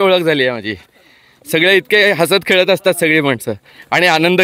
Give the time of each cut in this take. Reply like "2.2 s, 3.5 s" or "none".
none

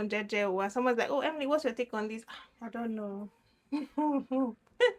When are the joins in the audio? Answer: none

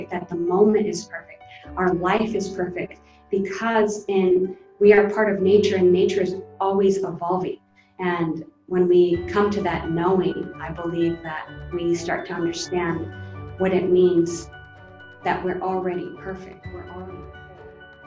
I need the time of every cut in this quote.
17.1 s

